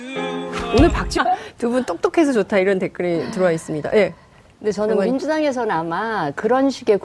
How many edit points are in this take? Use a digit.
0